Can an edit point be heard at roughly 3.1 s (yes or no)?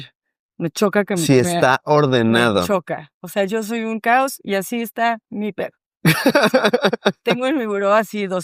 no